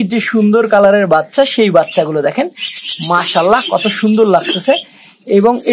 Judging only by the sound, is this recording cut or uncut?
uncut